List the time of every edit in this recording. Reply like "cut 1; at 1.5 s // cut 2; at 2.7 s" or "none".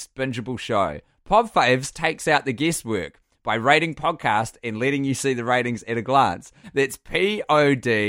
cut 1; at 1.1 s // cut 2; at 1.9 s // cut 3; at 6.6 s